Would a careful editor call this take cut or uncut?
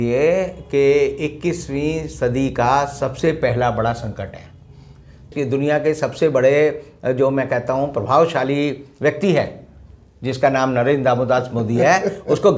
cut